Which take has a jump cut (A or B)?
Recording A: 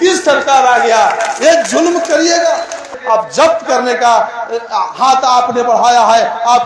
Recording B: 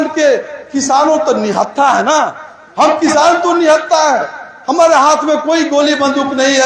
A